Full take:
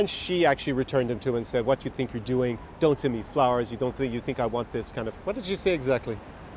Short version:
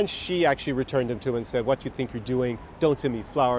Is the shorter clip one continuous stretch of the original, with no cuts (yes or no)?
yes